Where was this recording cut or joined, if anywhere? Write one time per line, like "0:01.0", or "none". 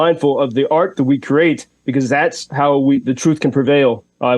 none